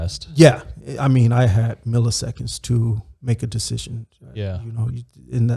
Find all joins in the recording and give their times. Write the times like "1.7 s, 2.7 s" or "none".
none